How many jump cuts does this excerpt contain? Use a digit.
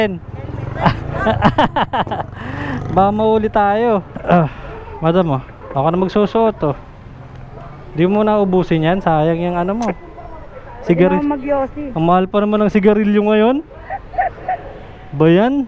0